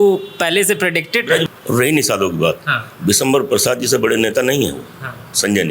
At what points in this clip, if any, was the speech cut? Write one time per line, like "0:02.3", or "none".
0:01.4

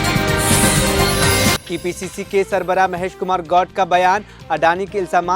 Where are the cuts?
0:01.6

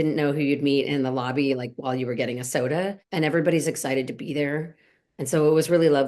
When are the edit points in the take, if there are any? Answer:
0:03.0

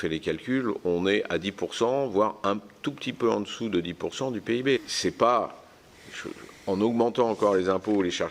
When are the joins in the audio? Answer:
0:04.8

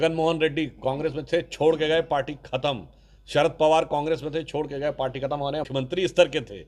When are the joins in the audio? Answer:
0:05.7

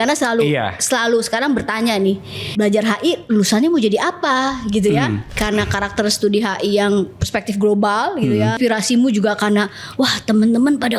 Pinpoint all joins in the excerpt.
0:02.4
0:05.3
0:08.6

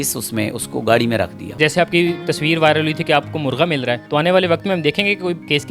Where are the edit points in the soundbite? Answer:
0:01.6

